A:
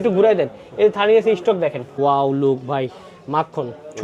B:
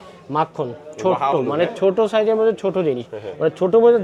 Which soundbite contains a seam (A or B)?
A